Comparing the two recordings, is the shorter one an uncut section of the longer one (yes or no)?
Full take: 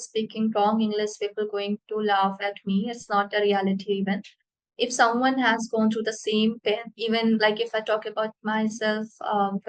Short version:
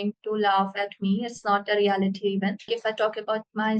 no